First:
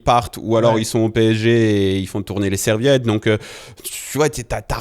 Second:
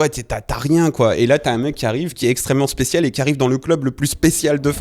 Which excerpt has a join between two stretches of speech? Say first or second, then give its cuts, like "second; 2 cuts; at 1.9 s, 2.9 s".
second; 1 cut; at 2.1 s